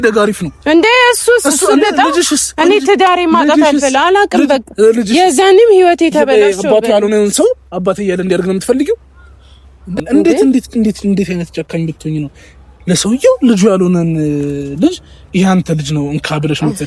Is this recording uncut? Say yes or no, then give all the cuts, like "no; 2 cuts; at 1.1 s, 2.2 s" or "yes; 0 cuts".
no; 1 cut; at 10.0 s